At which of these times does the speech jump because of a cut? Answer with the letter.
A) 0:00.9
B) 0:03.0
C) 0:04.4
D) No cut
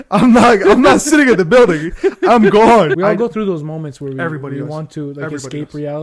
B